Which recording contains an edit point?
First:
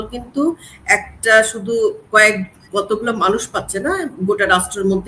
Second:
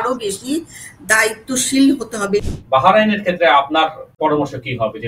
second; 2 cuts; at 2.5 s, 4.2 s

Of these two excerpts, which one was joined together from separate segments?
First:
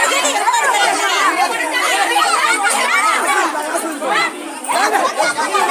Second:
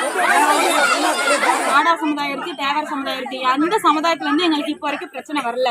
second; 1 cut; at 1.7 s

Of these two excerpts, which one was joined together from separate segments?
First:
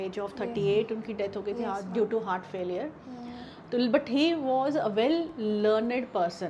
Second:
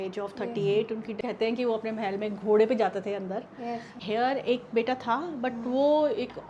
second; 2 cuts; at 1.1 s, 3.9 s

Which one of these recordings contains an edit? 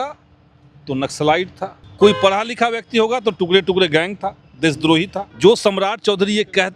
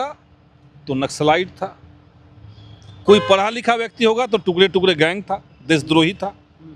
first; 2 cuts; at 1.8 s, 5.2 s

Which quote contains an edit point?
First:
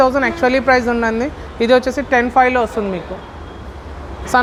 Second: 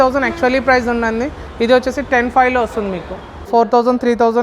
second; 1 cut; at 3.5 s

